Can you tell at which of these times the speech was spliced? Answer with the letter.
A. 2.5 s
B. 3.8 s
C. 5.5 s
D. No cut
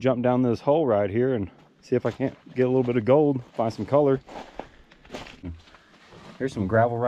C